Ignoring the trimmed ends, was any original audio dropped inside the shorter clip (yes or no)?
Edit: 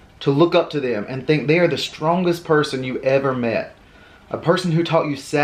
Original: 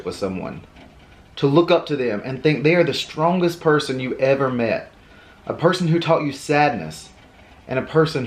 no